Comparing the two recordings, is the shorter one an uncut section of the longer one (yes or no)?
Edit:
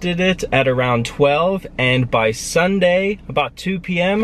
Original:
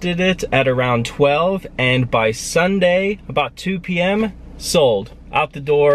yes